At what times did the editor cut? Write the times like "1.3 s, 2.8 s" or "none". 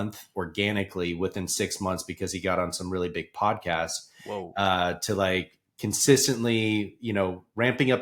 none